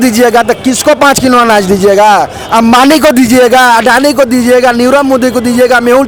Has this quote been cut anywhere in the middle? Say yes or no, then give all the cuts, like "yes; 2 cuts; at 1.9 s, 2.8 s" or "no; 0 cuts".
no; 0 cuts